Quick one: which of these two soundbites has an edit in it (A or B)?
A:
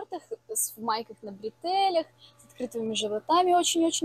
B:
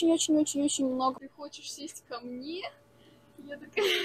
B